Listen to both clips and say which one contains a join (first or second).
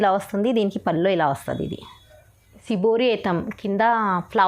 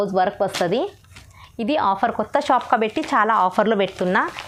first